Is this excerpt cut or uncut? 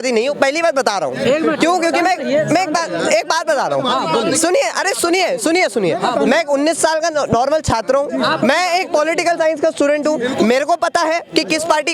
uncut